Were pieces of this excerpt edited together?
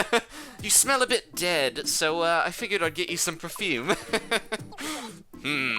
no; 0 cuts

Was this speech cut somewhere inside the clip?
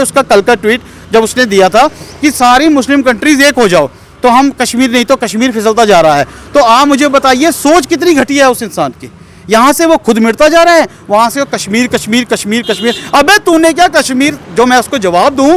no; 0 cuts

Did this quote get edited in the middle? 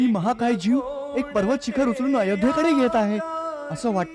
no; 0 cuts

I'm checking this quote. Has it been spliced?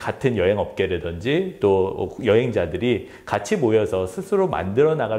no; 0 cuts

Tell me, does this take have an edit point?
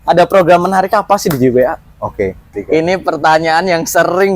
yes; 1 cut; at 2.4 s

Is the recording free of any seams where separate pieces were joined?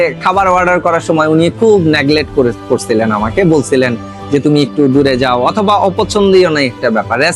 yes; 0 cuts

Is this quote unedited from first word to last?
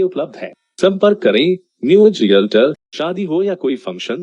no; 1 cut; at 2.9 s

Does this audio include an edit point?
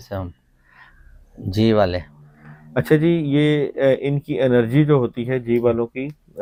no; 0 cuts

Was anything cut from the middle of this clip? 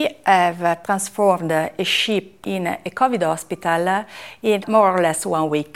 yes; 3 cuts; at 0.8 s, 2.4 s, 4.6 s

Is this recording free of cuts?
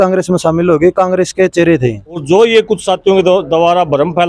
no; 1 cut; at 2.2 s

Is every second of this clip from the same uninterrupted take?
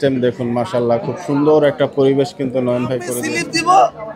no; 1 cut; at 3.1 s

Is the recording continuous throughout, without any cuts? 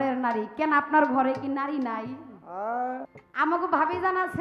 no; 1 cut; at 3.2 s

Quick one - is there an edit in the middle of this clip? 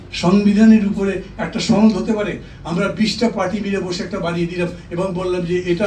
no; 0 cuts

